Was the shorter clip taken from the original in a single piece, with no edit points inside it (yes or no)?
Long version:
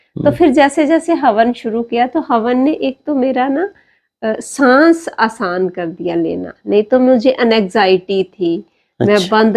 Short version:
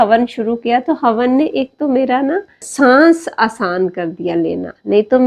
no